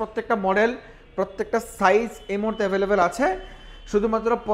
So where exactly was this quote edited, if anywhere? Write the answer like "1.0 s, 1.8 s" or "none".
none